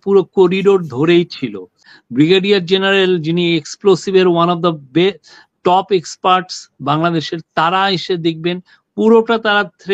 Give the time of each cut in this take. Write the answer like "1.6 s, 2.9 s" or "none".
1.9 s